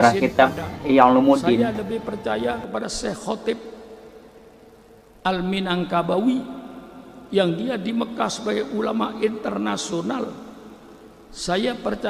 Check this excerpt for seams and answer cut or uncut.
cut